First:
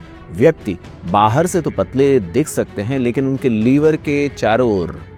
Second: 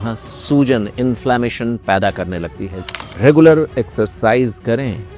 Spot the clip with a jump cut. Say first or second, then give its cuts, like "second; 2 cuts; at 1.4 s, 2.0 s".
second; 1 cut; at 2.7 s